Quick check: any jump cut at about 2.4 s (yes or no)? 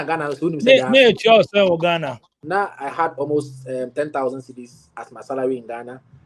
yes